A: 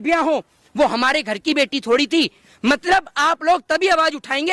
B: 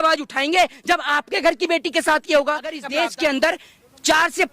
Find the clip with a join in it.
B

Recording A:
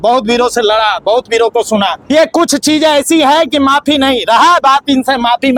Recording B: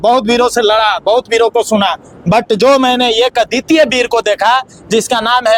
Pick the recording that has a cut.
A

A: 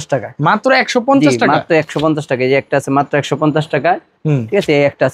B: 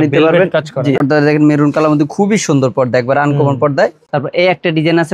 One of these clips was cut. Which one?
B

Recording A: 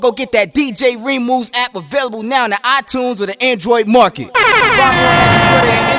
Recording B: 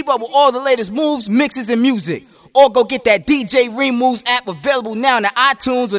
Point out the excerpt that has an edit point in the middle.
A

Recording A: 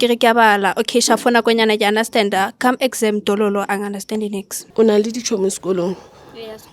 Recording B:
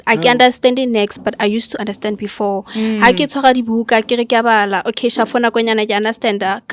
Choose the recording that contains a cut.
A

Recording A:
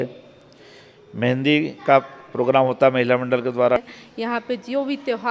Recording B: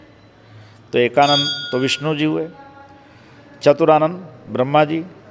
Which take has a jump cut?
A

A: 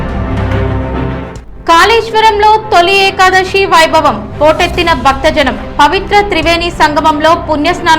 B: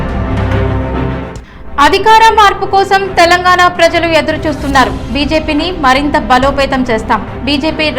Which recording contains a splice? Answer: B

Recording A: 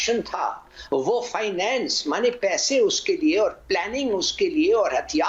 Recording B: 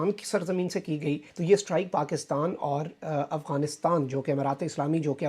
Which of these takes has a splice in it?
B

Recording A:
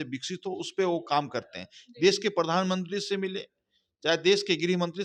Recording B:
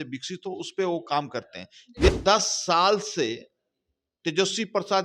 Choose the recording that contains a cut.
B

